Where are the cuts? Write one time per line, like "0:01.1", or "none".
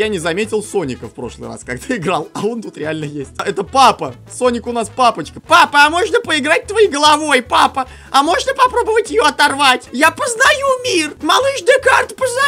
0:03.3
0:05.3
0:09.9
0:11.1

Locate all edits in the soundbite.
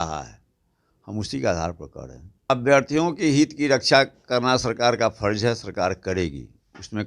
0:02.5

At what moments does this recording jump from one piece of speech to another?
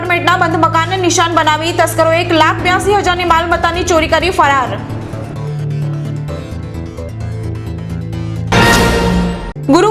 none

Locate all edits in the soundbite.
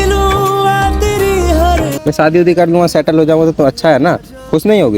0:01.9

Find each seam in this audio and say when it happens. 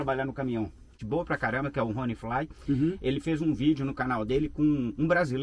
0:01.0

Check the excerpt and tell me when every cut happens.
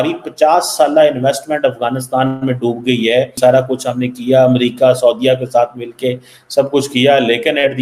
0:03.3

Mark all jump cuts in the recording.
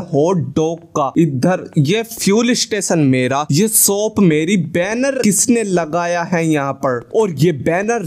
0:01.1
0:03.5
0:05.2

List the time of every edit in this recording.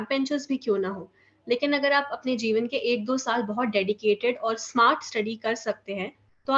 none

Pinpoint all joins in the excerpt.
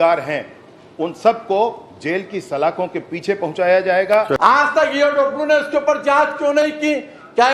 0:04.4

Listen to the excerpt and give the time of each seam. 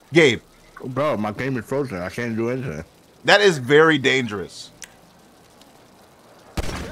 0:04.8

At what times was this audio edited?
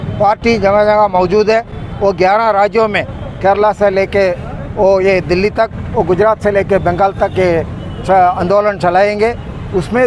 none

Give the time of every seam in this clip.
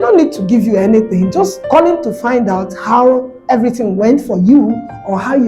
0:01.6

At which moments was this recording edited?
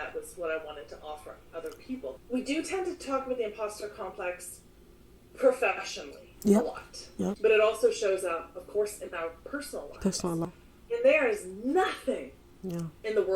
0:02.1
0:07.4
0:10.5

